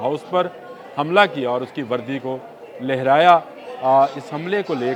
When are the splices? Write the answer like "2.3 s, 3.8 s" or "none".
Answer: none